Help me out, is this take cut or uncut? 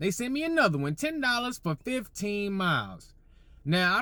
uncut